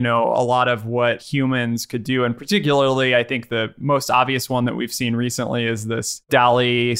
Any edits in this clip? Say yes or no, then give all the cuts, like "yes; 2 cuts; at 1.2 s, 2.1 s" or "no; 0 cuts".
yes; 2 cuts; at 1.2 s, 6.3 s